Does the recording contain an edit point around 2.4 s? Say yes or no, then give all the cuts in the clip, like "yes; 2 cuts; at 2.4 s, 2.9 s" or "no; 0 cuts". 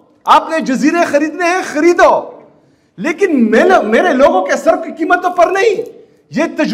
no; 0 cuts